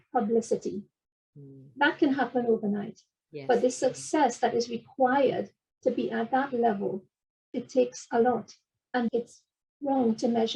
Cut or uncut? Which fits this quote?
cut